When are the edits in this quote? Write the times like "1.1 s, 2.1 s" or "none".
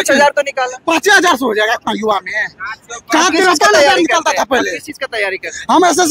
none

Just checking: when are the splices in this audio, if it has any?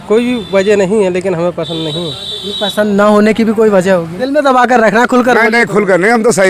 4.2 s

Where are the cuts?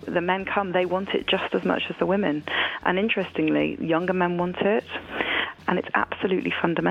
5.5 s

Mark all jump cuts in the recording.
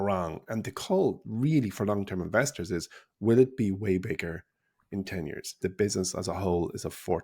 5.6 s

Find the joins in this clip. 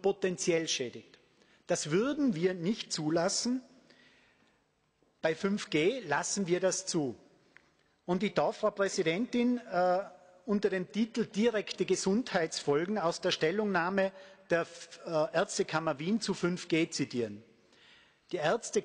none

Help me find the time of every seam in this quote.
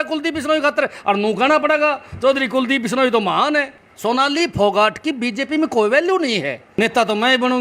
3.8 s, 6.6 s

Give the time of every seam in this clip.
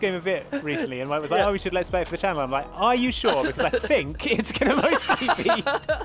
none

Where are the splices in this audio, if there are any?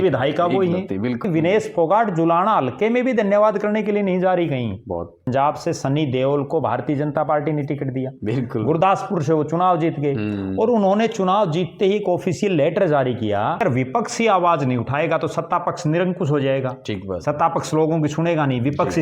1.2 s, 5.2 s, 13.6 s

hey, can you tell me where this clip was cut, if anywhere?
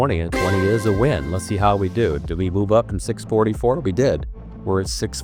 none

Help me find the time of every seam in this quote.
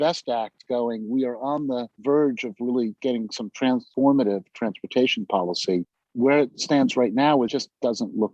6.0 s

